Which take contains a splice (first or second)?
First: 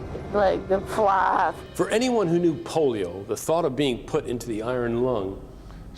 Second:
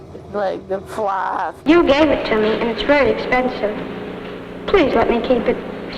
second